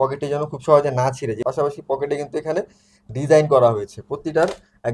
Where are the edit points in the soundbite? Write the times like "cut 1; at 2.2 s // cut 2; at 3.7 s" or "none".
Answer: cut 1; at 1.4 s